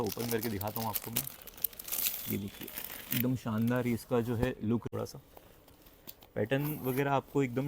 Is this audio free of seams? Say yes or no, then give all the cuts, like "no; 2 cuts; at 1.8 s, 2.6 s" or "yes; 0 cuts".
no; 1 cut; at 4.9 s